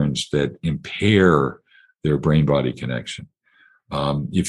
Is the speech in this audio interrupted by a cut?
no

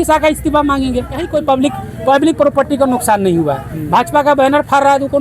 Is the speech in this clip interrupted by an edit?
yes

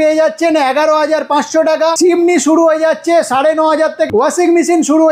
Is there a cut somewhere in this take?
yes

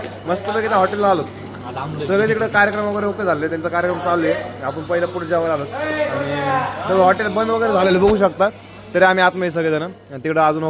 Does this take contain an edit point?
no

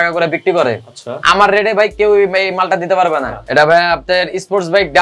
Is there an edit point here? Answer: yes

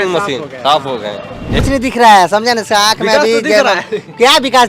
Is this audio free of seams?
no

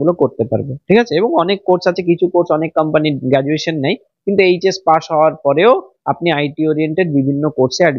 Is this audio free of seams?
yes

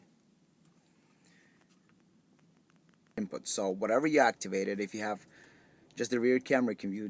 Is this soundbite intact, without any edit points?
no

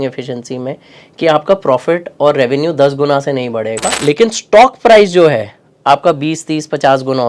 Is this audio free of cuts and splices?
no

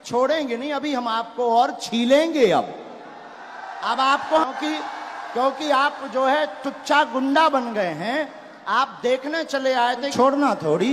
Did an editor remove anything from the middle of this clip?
yes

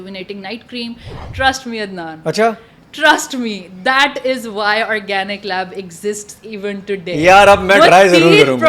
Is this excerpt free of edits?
no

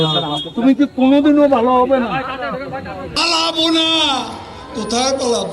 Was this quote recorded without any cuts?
no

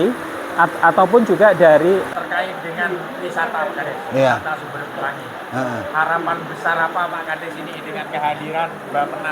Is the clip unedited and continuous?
no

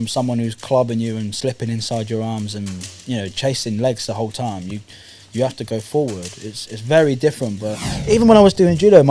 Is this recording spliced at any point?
yes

